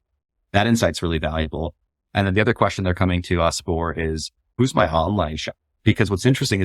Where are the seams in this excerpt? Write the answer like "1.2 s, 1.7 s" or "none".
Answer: 4.5 s

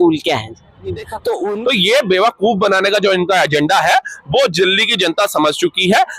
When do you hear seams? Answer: 1.5 s

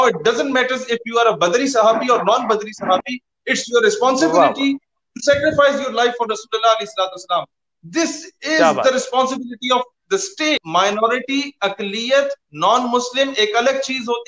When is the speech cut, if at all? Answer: 10.5 s

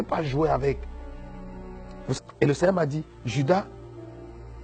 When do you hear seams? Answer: 2.2 s

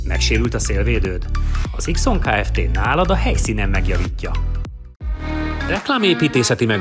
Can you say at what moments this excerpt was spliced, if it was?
4.9 s

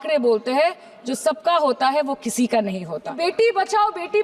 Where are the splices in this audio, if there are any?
3.2 s

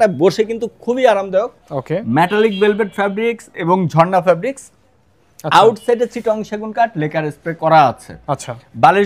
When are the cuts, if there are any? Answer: none

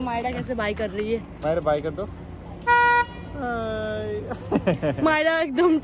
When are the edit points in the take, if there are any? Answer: none

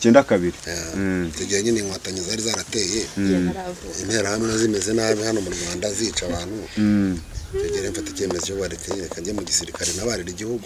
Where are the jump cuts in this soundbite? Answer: none

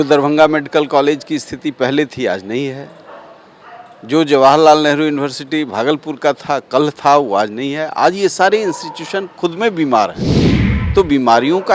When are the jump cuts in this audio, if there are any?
none

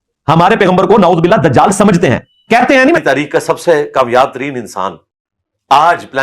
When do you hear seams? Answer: 3.0 s

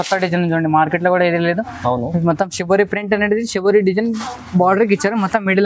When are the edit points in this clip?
none

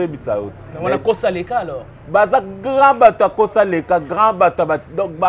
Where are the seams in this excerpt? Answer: none

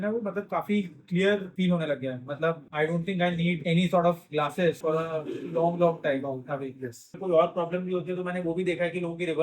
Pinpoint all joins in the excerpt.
1.5 s, 2.7 s, 3.6 s, 4.8 s, 7.2 s

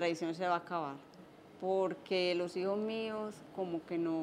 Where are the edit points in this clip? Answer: none

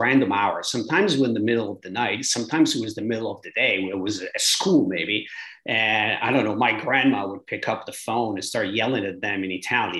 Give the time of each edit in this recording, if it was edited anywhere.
none

